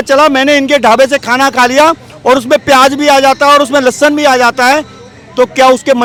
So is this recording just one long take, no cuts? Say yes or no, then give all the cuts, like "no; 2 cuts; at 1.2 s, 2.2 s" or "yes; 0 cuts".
yes; 0 cuts